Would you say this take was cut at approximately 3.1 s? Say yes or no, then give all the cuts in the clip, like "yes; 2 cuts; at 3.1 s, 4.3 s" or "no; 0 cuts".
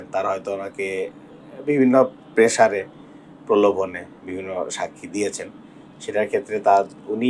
no; 0 cuts